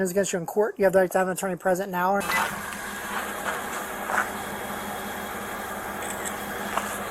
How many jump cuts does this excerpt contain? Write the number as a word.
one